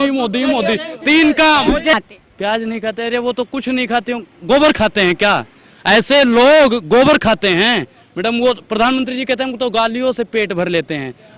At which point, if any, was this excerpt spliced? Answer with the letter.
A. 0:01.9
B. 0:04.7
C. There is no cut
A